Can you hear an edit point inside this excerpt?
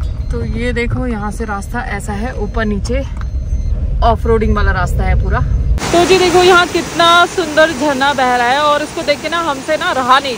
yes; 1 cut; at 5.8 s

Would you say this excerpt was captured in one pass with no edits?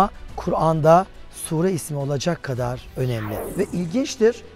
no; 1 cut; at 3.4 s

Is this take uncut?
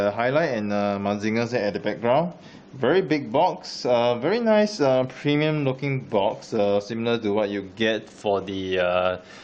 no; 1 cut; at 1.2 s

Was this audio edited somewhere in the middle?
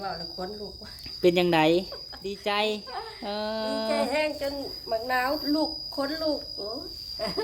yes; 1 cut; at 2.4 s

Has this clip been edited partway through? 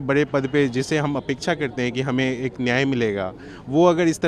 no; 0 cuts

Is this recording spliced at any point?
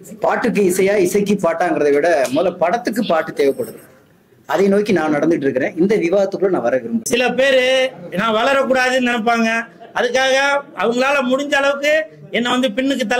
yes; 1 cut; at 7.0 s

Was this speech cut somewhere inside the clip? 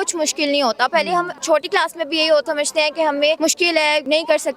yes; 3 cuts; at 1.4 s, 2.5 s, 3.8 s

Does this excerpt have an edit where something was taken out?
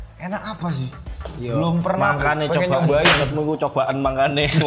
no; 0 cuts

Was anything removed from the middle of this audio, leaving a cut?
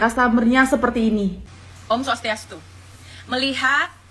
yes; 1 cut; at 1.4 s

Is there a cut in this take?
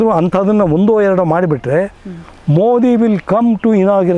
no; 0 cuts

